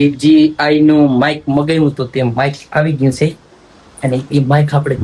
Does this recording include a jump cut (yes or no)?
no